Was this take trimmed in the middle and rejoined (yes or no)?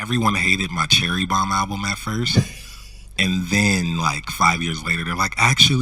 no